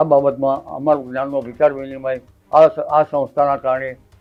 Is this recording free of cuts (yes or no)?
yes